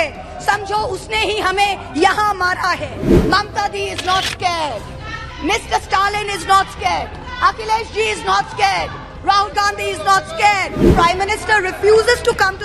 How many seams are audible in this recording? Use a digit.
2